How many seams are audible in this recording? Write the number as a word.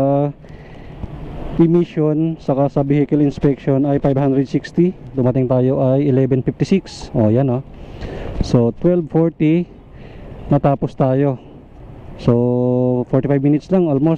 one